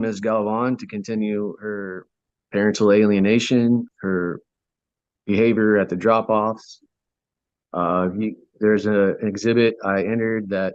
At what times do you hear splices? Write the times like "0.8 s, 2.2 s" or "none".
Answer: 3.9 s